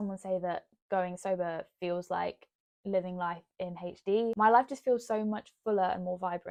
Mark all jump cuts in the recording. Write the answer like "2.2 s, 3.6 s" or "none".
none